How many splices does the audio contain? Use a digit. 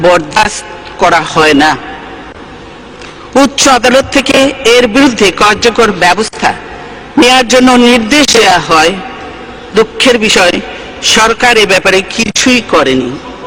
0